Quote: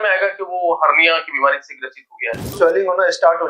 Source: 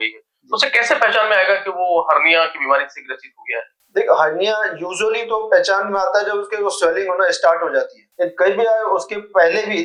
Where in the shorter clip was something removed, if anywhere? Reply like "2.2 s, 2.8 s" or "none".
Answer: 2.5 s